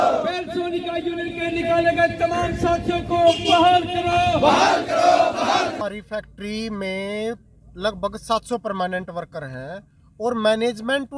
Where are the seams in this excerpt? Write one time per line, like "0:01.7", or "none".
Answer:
0:05.8